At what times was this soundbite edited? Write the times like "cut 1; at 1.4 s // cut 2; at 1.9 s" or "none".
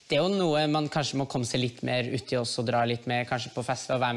none